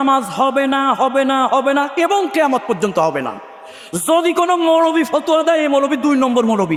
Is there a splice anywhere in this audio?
no; 0 cuts

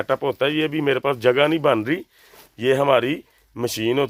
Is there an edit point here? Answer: no; 0 cuts

